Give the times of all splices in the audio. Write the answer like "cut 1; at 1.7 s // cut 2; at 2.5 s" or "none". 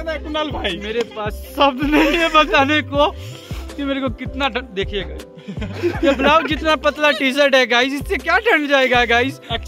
none